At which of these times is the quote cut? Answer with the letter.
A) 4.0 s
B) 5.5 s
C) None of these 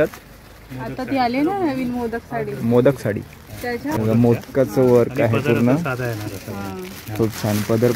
A